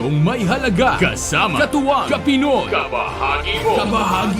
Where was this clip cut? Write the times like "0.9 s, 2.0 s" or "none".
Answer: 1.0 s

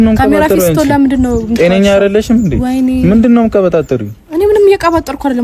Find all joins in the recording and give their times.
none

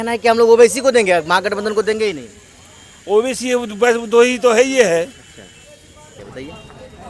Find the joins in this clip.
6.2 s

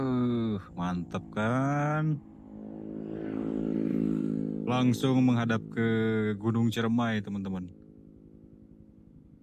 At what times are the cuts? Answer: none

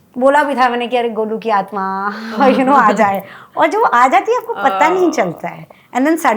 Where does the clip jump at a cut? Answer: none

